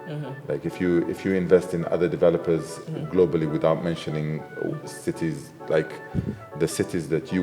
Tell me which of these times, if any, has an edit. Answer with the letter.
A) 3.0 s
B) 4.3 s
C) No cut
C